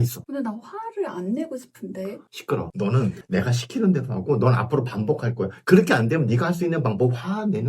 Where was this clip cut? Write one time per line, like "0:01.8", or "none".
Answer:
0:03.2